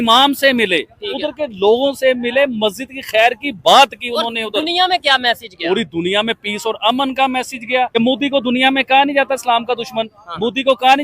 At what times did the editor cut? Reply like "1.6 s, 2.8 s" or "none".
7.9 s